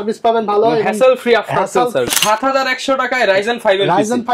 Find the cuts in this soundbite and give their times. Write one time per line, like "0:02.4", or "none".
0:02.1